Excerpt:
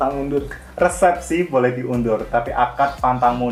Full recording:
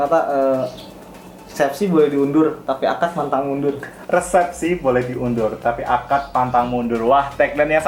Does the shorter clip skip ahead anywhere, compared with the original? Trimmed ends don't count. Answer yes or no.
no